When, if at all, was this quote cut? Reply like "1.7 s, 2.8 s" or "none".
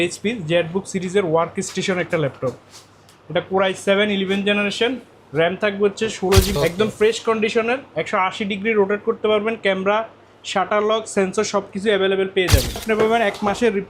6.5 s, 12.8 s